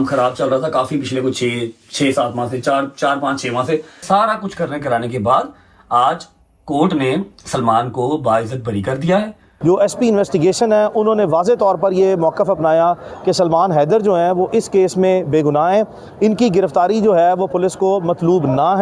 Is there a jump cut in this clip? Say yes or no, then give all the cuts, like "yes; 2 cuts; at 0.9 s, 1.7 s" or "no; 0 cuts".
yes; 2 cuts; at 4.0 s, 9.5 s